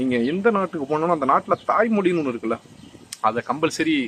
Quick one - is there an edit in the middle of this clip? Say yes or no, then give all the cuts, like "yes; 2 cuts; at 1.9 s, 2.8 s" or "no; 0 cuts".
no; 0 cuts